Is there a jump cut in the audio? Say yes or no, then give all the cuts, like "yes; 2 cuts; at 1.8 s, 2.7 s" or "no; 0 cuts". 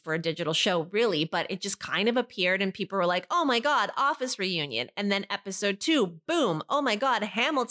no; 0 cuts